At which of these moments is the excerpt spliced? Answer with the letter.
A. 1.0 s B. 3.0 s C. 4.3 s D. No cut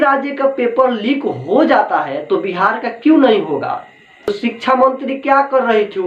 C